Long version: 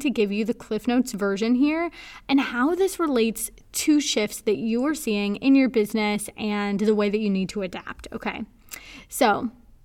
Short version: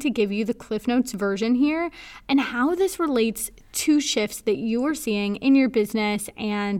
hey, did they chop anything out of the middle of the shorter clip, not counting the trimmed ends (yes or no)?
no